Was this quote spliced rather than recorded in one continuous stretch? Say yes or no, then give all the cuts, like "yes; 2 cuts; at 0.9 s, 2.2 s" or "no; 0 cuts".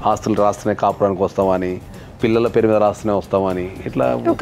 no; 0 cuts